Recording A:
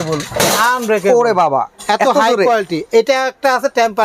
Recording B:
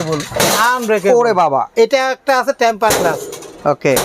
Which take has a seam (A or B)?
B